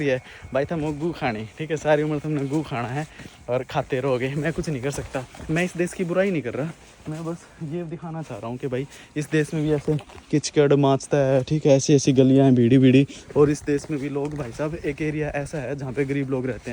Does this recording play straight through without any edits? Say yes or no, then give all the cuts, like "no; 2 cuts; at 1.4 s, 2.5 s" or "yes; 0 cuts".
yes; 0 cuts